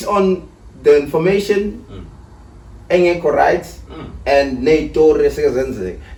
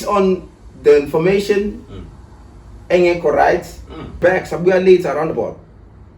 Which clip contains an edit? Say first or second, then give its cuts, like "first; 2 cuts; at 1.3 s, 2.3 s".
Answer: second; 1 cut; at 4.2 s